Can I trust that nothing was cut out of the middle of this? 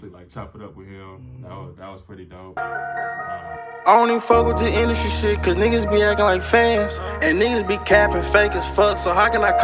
no; 1 cut; at 2.5 s

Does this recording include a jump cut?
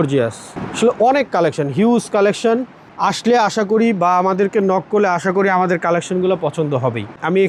no; 0 cuts

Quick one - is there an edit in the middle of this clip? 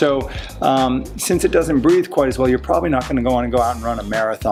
no; 0 cuts

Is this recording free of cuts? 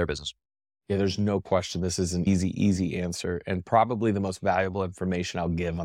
no; 1 cut; at 2.3 s

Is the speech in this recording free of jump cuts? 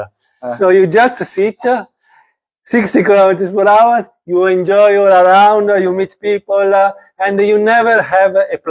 yes; 0 cuts

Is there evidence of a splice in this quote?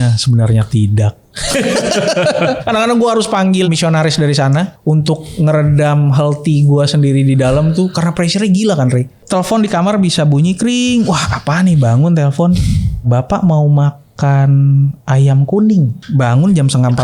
yes; 6 cuts; at 2.6 s, 3.7 s, 4.7 s, 9.2 s, 13.1 s, 16.0 s

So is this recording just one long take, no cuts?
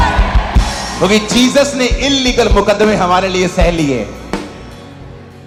yes; 0 cuts

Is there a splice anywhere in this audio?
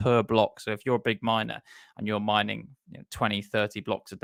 no; 0 cuts

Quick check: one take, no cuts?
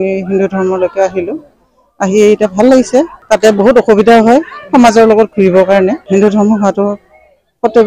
no; 2 cuts; at 3.2 s, 6.0 s

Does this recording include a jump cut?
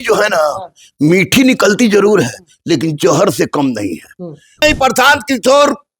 yes; 1 cut; at 4.6 s

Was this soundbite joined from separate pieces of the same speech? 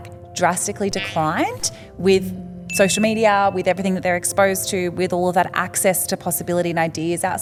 no; 0 cuts

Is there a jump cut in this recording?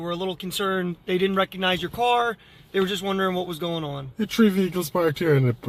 no; 0 cuts

